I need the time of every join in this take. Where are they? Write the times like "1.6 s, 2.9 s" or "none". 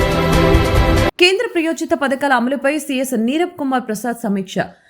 0.9 s